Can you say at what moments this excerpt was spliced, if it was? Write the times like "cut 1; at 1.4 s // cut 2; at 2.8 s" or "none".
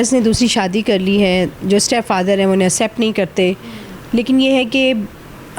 none